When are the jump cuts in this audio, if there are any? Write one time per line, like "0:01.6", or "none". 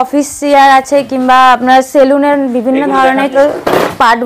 0:03.3